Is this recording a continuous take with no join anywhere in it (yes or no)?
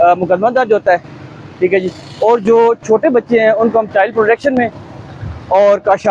yes